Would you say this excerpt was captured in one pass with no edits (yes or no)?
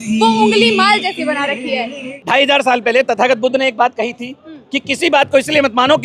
no